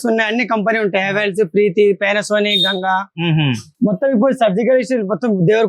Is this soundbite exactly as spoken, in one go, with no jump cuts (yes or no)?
no